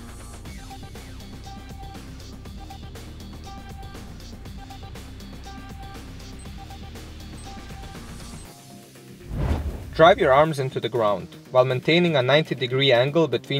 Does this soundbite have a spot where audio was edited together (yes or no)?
yes